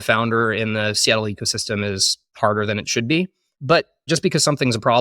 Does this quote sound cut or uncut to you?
cut